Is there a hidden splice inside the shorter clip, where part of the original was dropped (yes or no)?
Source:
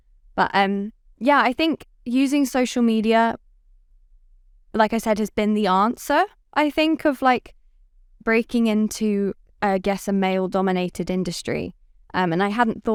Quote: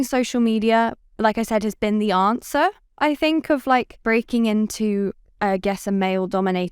yes